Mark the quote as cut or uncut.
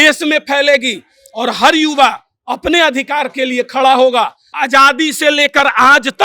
cut